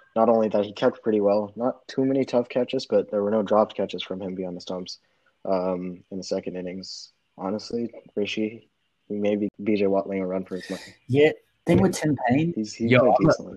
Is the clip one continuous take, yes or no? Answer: no